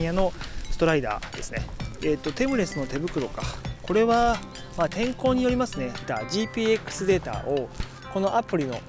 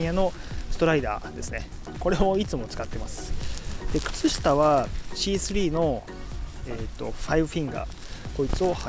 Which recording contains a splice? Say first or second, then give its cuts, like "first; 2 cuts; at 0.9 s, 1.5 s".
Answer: first; 2 cuts; at 1.8 s, 6.0 s